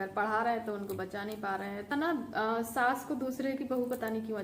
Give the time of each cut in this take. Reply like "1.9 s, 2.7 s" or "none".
1.9 s